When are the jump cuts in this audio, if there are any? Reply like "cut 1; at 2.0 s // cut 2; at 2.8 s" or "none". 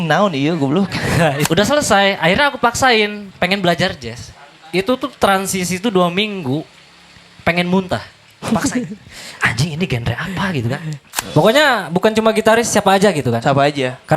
cut 1; at 1.4 s // cut 2; at 11.1 s